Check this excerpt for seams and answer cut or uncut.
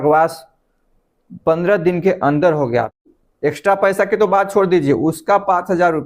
cut